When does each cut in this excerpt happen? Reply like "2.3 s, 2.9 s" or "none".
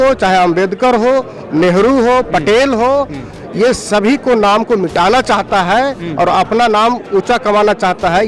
none